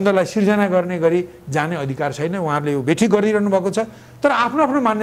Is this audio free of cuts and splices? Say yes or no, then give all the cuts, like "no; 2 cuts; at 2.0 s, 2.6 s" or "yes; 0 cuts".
yes; 0 cuts